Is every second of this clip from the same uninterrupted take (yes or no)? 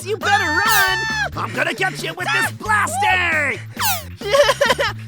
no